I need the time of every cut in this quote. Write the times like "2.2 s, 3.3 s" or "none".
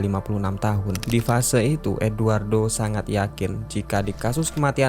1.0 s